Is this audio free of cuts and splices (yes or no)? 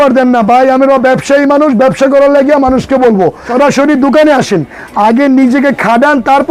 no